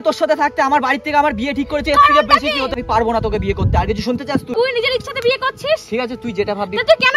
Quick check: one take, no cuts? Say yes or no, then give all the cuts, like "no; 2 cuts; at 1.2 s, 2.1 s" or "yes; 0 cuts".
no; 2 cuts; at 2.7 s, 4.5 s